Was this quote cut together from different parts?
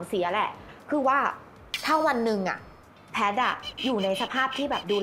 no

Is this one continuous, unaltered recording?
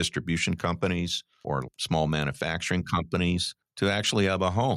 no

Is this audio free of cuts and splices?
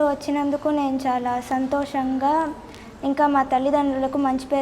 yes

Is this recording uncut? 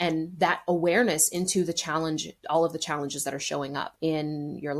no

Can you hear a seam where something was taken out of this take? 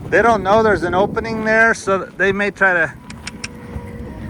no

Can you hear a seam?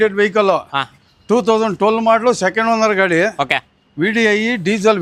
no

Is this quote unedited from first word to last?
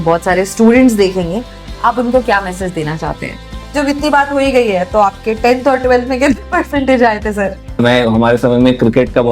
no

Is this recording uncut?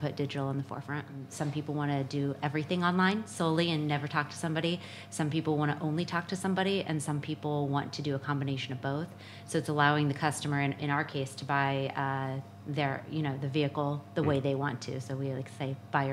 no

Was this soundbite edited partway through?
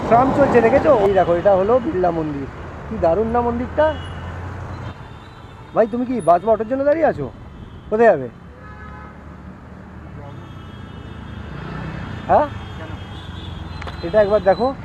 yes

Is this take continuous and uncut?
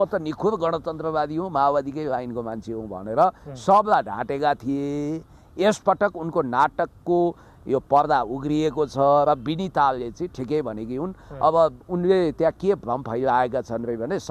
yes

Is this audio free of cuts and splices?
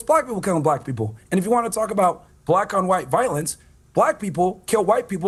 yes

